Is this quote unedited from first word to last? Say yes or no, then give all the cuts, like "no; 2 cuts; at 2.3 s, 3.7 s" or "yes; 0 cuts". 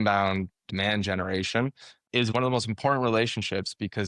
no; 1 cut; at 2.3 s